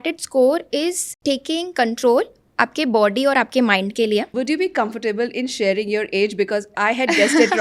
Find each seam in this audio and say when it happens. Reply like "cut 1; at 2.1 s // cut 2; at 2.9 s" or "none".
cut 1; at 1.1 s // cut 2; at 4.3 s